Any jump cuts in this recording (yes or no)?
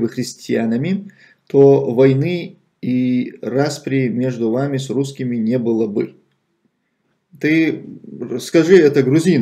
yes